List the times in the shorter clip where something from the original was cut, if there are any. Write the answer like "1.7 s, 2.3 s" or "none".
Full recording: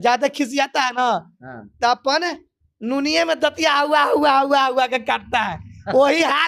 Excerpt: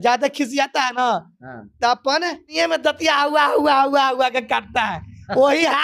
2.5 s